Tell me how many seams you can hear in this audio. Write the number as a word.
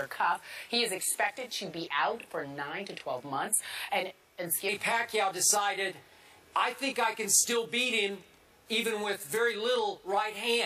zero